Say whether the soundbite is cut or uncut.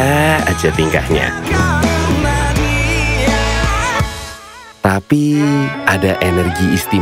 uncut